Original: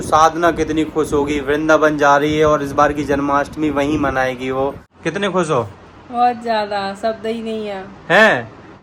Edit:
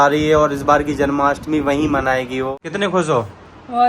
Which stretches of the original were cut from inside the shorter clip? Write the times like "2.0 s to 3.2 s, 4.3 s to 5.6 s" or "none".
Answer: 4.6 s to 4.9 s